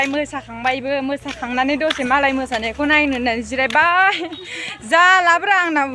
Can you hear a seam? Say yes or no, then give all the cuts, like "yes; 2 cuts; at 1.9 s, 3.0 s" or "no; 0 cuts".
no; 0 cuts